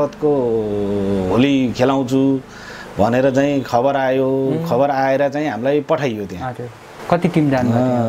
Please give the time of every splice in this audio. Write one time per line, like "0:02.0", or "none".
none